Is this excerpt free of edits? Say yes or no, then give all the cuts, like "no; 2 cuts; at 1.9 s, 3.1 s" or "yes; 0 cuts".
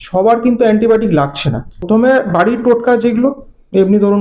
no; 1 cut; at 1.8 s